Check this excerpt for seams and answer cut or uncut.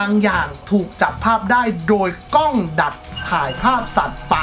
uncut